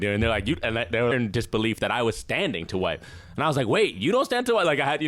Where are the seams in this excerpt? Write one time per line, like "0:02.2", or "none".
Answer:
0:01.1

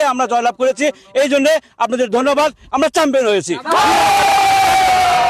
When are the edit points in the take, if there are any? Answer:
none

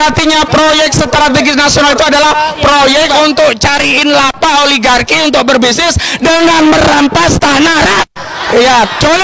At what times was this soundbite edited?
none

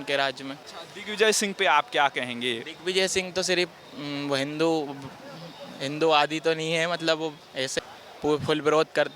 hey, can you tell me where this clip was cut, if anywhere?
0:07.7

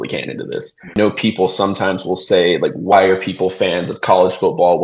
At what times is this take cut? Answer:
0:00.9
0:02.9

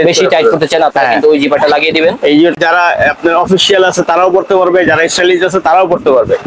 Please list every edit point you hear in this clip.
0:02.6

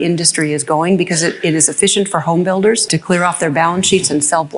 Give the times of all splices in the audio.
0:02.9

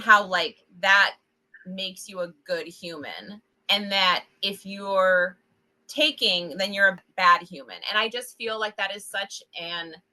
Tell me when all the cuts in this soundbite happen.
0:07.0

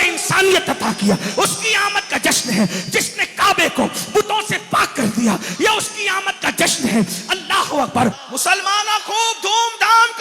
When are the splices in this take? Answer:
0:08.2

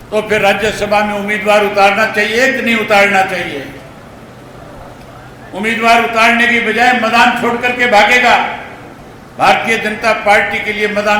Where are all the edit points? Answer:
none

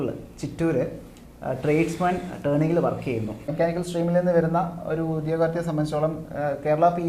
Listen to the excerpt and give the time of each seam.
0:03.5

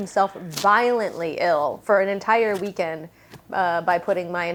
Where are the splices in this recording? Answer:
none

